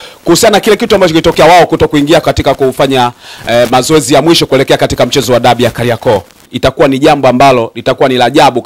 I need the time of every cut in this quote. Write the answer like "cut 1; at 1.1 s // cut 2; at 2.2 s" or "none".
cut 1; at 6.9 s